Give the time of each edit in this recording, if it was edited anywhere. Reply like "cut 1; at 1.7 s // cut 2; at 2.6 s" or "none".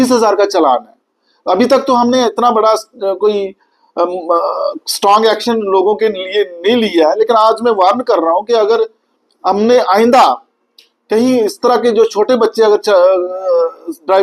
none